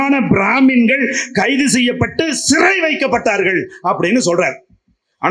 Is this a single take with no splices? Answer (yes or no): yes